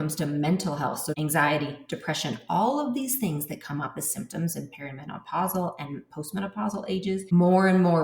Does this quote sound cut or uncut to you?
cut